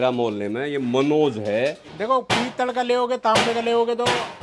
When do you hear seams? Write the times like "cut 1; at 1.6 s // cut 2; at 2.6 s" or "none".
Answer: cut 1; at 1.9 s